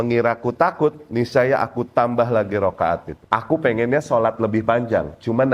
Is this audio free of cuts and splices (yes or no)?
no